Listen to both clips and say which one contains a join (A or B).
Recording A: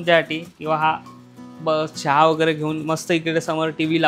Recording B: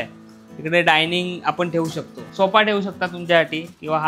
B